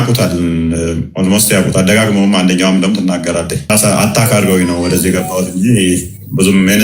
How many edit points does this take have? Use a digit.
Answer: 0